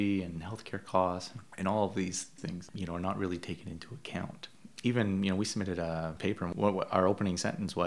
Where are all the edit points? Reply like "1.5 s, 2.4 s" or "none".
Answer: none